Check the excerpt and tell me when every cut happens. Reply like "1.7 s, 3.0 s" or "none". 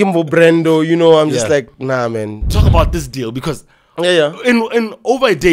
2.5 s

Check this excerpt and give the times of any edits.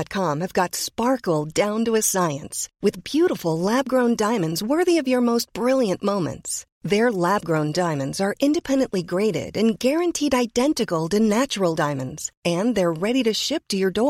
none

